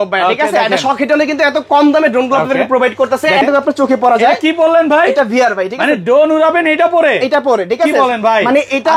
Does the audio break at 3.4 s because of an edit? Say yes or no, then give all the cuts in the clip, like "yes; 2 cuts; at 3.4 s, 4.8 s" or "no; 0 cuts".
yes; 1 cut; at 3.4 s